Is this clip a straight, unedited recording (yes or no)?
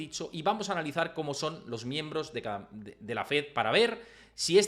yes